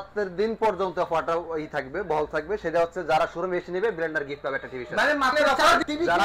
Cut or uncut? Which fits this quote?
cut